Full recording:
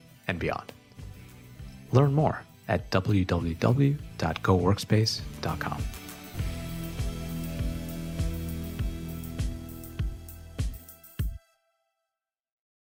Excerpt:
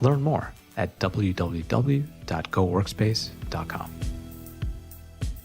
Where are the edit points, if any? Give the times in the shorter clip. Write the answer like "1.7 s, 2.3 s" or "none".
3.9 s